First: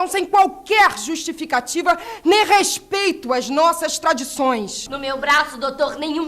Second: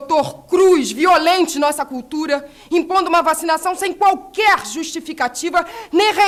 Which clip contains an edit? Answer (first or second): first